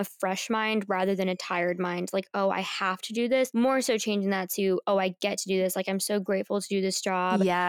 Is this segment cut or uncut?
uncut